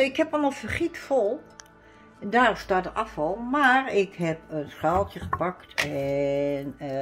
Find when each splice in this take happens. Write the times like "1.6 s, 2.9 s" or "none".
none